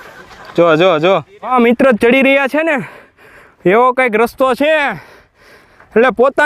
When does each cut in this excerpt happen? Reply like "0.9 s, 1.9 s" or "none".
1.4 s